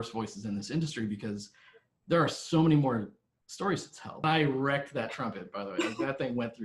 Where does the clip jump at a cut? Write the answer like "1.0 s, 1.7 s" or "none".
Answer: 4.2 s

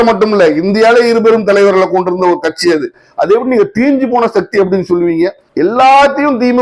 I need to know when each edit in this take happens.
5.4 s

